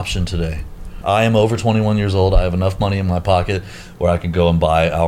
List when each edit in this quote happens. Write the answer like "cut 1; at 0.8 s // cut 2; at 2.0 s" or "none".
cut 1; at 1.0 s